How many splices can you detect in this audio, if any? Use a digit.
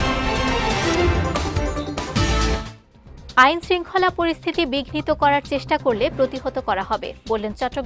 1